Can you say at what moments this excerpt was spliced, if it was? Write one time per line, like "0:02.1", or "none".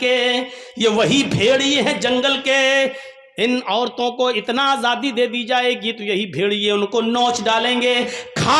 none

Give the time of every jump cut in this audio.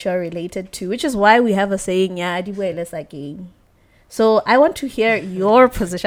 none

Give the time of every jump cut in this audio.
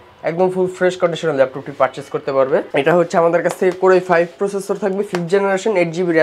none

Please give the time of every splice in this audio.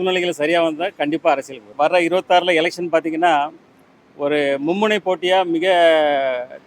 0:01.6

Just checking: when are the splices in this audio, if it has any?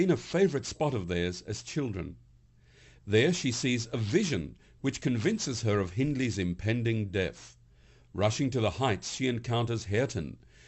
0:08.6

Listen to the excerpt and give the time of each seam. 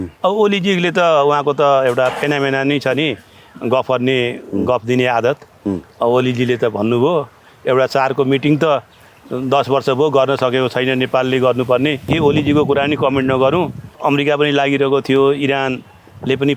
0:12.1
0:13.8

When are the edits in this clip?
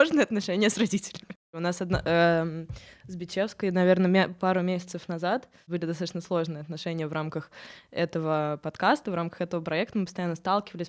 none

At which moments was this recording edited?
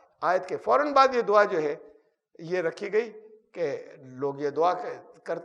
none

